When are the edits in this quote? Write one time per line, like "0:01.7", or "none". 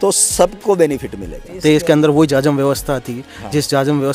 0:01.5